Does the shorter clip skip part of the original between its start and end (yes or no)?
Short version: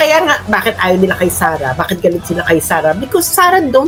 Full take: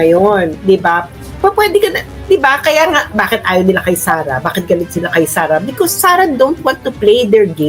no